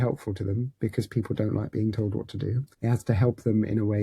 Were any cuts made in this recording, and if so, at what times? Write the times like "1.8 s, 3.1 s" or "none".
2.7 s